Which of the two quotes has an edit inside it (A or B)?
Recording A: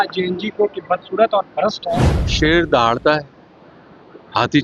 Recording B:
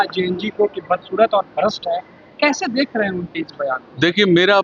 A